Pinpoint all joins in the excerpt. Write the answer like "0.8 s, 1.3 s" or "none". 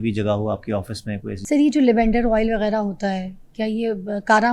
1.3 s